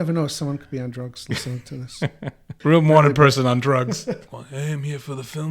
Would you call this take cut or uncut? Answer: cut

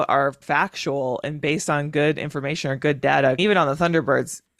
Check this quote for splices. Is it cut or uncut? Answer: cut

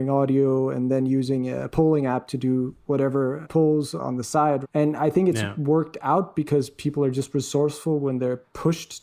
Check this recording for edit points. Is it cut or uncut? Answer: uncut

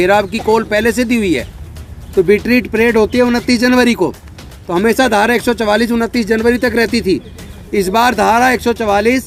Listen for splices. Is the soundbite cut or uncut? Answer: uncut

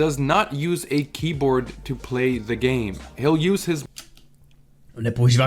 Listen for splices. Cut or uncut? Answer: uncut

